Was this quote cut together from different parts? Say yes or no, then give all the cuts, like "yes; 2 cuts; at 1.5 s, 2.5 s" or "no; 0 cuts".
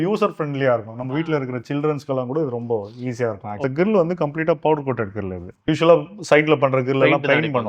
yes; 1 cut; at 3.6 s